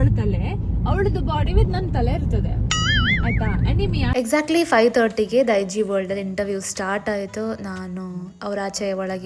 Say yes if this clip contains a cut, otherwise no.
yes